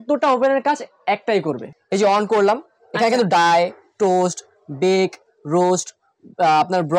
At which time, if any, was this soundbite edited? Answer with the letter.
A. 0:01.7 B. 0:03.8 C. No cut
A